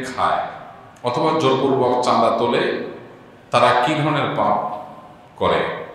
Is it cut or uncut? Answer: uncut